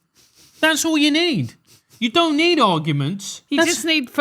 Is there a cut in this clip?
yes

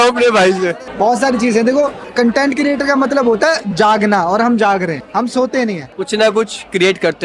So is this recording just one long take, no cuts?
yes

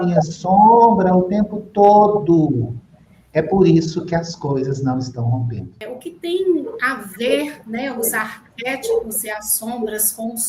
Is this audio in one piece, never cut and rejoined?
no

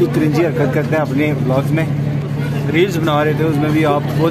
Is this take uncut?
no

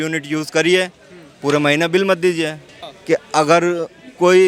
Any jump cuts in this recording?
yes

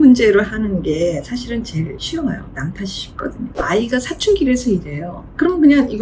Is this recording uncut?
no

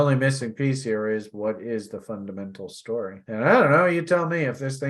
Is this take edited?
no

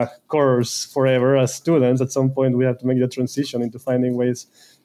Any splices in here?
no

